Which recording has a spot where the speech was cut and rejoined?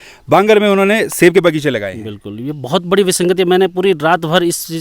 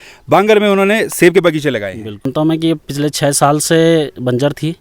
second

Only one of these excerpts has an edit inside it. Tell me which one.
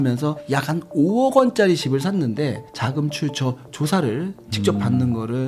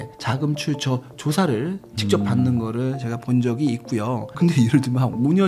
second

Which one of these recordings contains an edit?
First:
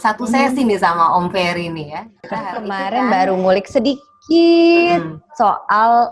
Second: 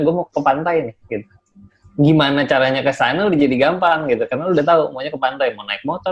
first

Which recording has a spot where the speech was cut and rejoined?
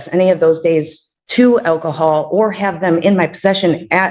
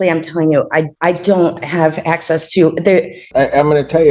second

